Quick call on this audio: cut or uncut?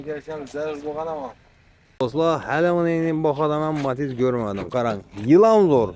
cut